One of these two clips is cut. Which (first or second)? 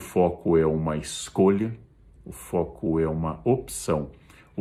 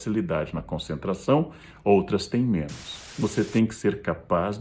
second